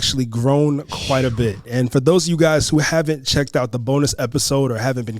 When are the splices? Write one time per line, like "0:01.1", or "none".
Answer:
0:01.7